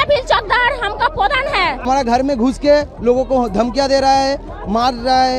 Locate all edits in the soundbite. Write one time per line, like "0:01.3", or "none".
0:01.8